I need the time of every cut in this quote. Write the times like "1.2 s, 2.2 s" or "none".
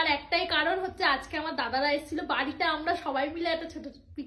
none

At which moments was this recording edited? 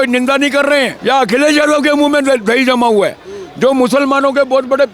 0.9 s

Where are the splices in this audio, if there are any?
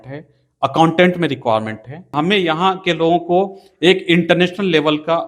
2.1 s

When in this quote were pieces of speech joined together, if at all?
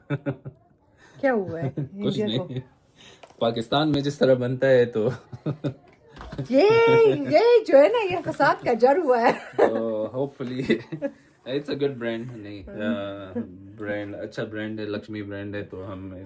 none

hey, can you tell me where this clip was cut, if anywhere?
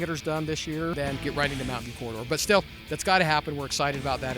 1.1 s

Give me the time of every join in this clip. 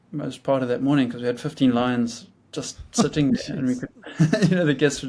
none

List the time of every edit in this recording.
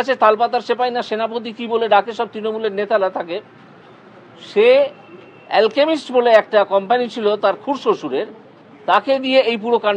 none

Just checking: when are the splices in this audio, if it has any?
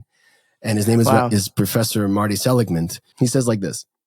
3.0 s

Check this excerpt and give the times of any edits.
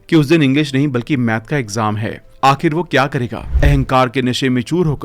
3.4 s

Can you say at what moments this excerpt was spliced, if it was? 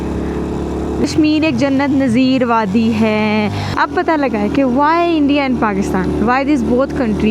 1.0 s, 3.7 s

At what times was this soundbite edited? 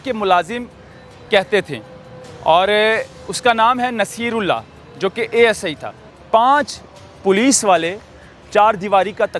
6.1 s

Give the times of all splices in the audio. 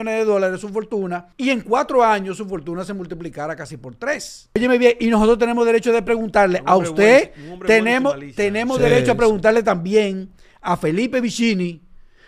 1.2 s, 4.6 s

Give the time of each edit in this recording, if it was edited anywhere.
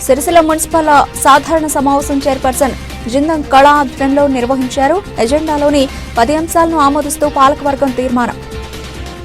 none

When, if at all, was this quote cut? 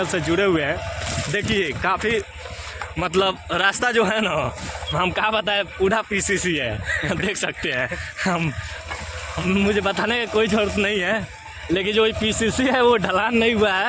none

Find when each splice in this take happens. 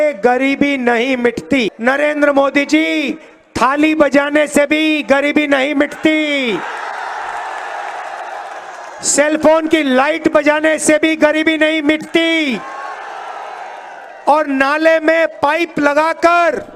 1.8 s

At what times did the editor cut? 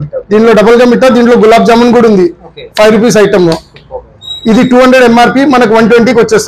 none

